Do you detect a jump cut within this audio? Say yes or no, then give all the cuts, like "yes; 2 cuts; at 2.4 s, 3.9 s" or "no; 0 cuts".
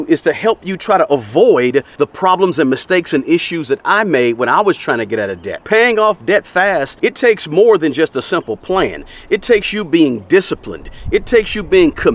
yes; 3 cuts; at 1.9 s, 5.5 s, 6.9 s